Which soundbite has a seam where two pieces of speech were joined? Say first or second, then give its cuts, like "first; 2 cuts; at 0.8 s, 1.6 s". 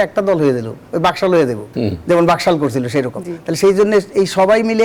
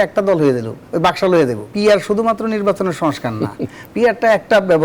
second; 1 cut; at 1.7 s